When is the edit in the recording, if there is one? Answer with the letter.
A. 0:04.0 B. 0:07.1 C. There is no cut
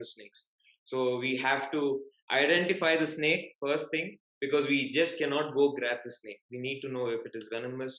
C